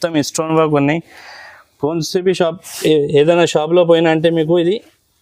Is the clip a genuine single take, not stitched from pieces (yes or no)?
yes